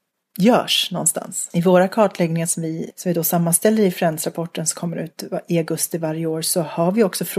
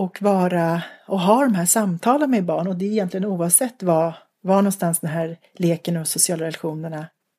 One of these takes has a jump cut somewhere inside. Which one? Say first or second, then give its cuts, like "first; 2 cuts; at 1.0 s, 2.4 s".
first; 2 cuts; at 1.4 s, 2.9 s